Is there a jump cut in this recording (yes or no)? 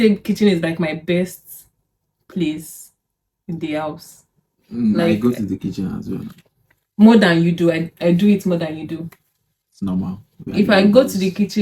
no